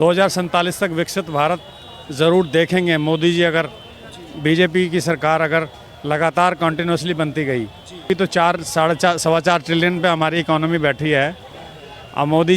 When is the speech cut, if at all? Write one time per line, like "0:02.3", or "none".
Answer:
0:08.1

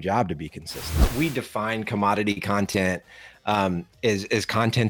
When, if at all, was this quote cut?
0:01.0

